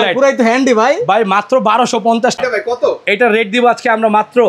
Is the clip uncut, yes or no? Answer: no